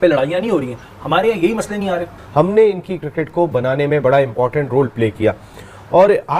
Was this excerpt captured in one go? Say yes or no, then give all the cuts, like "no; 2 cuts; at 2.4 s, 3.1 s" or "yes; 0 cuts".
no; 1 cut; at 2.2 s